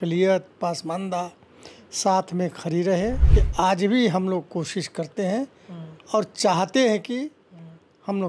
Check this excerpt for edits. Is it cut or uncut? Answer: cut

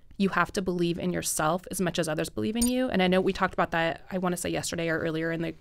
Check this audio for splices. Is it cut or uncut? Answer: uncut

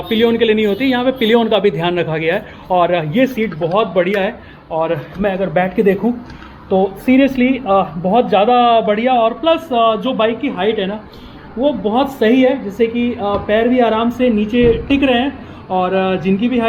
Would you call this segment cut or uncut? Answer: uncut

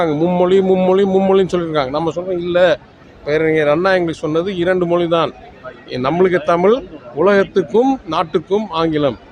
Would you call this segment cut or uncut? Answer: uncut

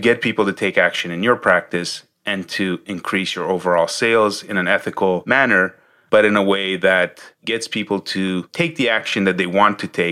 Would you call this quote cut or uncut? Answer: uncut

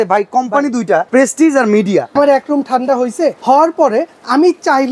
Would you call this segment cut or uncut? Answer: cut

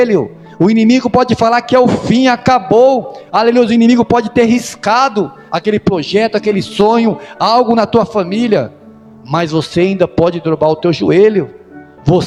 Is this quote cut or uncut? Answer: uncut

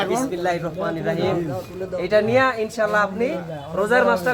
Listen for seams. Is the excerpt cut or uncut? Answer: uncut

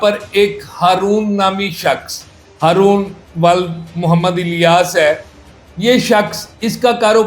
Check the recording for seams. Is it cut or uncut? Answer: uncut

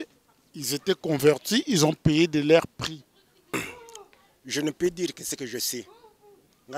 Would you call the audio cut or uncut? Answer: cut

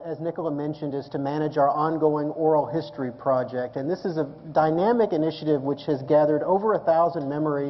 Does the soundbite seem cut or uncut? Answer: cut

